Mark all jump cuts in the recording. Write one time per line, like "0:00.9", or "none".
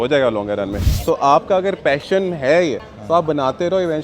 0:00.9
0:02.9

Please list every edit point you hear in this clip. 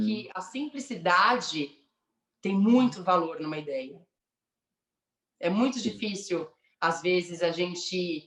none

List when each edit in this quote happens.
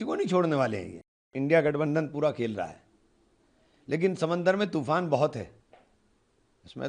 0:01.3

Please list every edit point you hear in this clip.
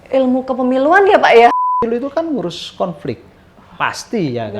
0:01.8

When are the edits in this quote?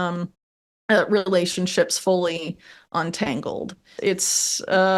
0:03.8

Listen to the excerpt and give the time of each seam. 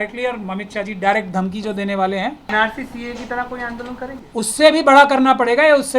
0:02.5

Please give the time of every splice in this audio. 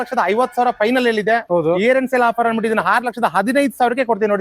none

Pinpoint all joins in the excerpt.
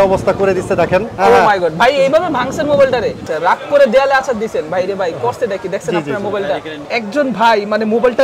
0:01.1
0:03.2
0:06.8

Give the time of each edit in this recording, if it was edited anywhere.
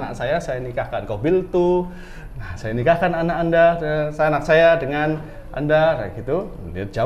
none

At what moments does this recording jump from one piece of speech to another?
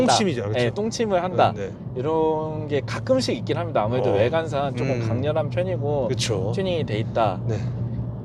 none

